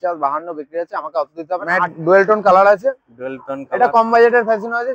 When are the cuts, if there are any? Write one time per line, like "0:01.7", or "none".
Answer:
0:01.9